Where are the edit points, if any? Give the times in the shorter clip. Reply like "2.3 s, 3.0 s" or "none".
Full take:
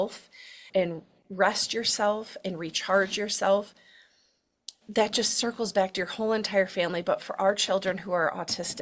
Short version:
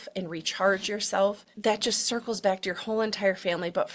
1.5 s